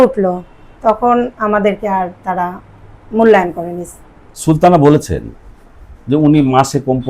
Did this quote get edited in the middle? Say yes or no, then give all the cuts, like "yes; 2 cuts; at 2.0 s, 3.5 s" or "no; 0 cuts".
yes; 1 cut; at 4.3 s